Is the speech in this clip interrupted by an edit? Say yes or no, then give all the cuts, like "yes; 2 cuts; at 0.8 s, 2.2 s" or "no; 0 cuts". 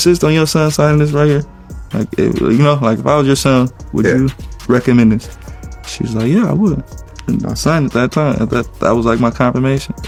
no; 0 cuts